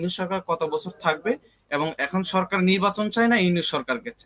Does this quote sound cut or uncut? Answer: uncut